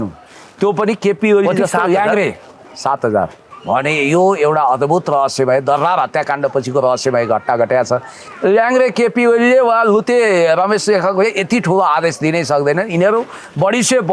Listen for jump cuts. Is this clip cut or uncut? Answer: cut